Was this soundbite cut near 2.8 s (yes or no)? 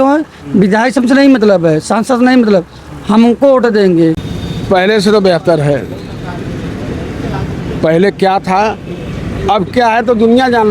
no